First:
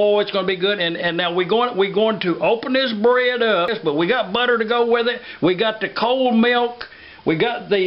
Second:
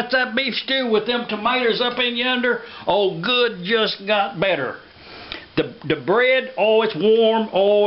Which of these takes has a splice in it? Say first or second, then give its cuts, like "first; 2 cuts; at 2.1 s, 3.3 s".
first; 1 cut; at 3.8 s